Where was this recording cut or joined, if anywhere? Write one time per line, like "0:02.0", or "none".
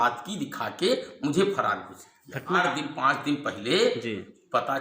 0:02.6

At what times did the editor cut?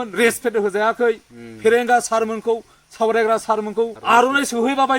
0:04.0

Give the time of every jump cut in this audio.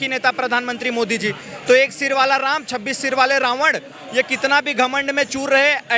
none

